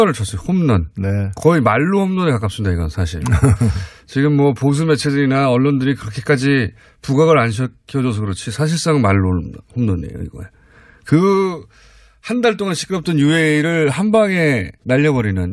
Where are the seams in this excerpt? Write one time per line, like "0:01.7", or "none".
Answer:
none